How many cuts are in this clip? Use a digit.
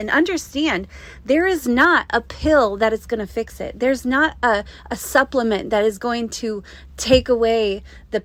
0